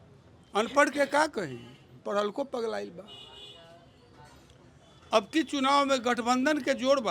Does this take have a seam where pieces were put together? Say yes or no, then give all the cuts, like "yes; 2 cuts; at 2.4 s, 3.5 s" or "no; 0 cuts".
no; 0 cuts